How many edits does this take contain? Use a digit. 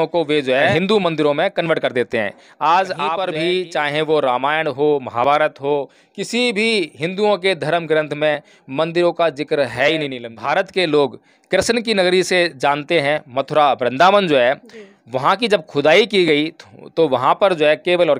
3